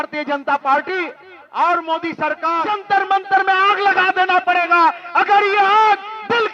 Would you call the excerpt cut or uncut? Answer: cut